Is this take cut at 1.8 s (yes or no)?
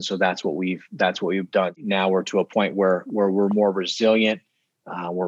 yes